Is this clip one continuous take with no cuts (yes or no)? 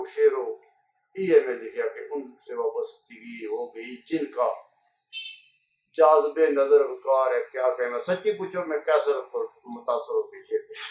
yes